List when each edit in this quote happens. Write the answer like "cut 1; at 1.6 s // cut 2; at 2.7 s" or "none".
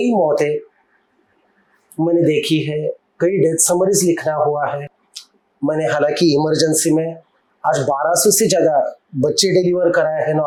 none